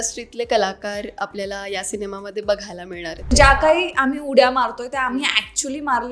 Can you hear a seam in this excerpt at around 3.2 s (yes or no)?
yes